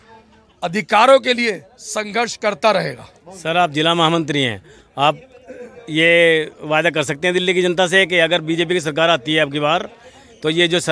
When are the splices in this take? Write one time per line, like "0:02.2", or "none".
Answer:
none